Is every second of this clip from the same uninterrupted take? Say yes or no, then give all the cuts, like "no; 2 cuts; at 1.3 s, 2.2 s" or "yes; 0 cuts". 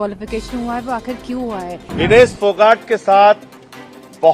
no; 1 cut; at 1.5 s